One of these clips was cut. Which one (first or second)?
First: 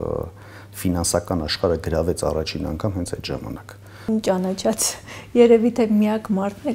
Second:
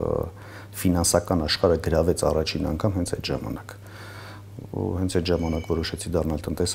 first